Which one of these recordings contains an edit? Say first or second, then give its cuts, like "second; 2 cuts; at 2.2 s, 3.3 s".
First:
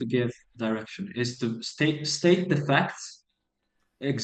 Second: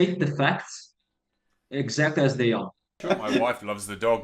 second; 1 cut; at 3.0 s